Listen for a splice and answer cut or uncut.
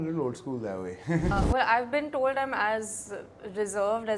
cut